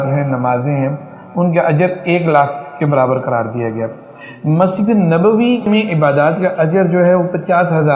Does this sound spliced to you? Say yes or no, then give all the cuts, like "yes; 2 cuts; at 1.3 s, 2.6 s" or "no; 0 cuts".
yes; 1 cut; at 5.7 s